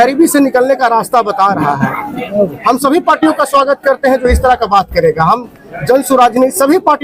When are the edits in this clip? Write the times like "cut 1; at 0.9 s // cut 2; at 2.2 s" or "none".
none

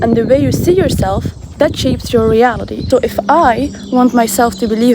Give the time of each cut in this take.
cut 1; at 2.7 s

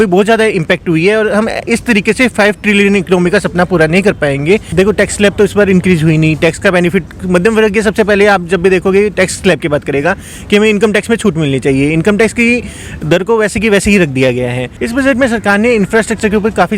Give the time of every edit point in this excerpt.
cut 1; at 4.7 s // cut 2; at 14.7 s

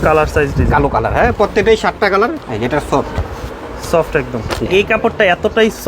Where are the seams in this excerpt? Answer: cut 1; at 2.4 s // cut 2; at 4.7 s

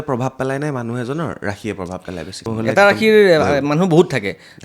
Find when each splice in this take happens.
cut 1; at 2.4 s

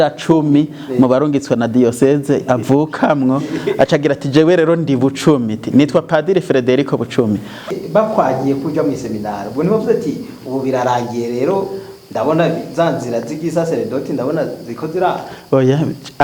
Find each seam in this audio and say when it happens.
cut 1; at 7.7 s

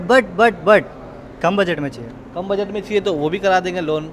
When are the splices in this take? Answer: none

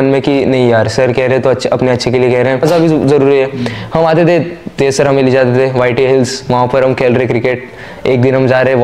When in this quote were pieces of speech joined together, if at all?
cut 1; at 2.6 s

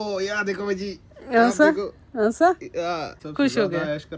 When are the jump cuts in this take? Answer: cut 1; at 3.2 s

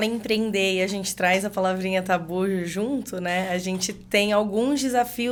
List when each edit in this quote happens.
none

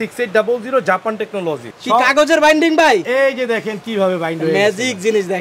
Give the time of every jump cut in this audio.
cut 1; at 1.7 s

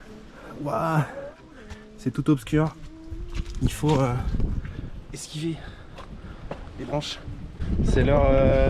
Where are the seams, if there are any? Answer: cut 1; at 7.5 s

